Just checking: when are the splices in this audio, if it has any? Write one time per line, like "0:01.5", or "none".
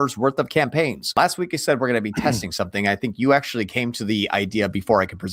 0:01.0